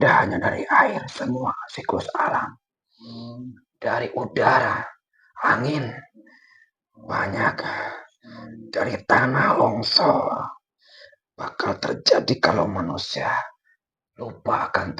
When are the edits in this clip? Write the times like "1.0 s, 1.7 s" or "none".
none